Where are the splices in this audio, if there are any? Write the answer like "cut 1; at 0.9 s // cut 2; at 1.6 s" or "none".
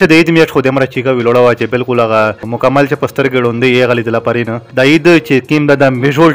cut 1; at 2.5 s // cut 2; at 4.6 s

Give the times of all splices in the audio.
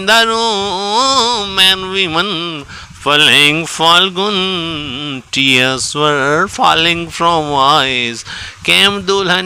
none

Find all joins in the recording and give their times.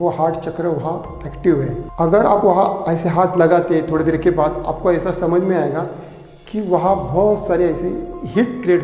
none

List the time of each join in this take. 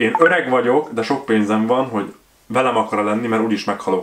none

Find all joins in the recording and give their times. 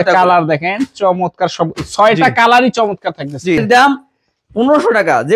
cut 1; at 3.6 s

